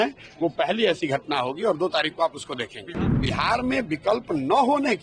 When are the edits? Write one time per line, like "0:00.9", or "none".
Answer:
0:03.0